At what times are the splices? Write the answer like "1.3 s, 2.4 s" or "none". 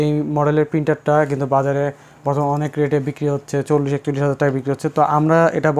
none